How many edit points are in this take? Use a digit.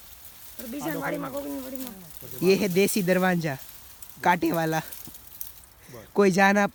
0